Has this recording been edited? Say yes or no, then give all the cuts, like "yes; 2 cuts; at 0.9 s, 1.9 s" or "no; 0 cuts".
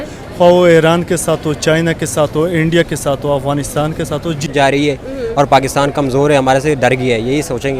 yes; 1 cut; at 4.5 s